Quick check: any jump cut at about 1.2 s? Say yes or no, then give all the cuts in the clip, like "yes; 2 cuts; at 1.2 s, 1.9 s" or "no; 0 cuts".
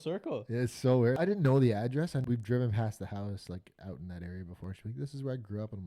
yes; 2 cuts; at 1.2 s, 2.2 s